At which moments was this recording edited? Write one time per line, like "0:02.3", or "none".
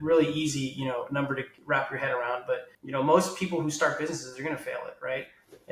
0:01.5
0:02.7